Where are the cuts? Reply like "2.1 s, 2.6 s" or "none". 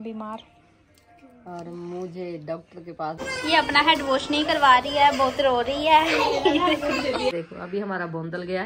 3.2 s, 7.3 s